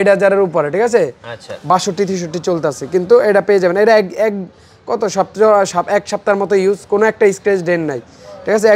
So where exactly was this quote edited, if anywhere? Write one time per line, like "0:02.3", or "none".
none